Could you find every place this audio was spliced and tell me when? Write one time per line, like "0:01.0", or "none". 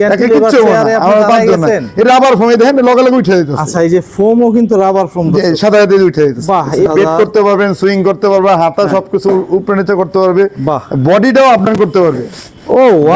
0:06.9